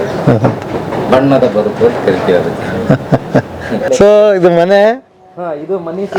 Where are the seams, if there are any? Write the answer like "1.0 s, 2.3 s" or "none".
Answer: 3.8 s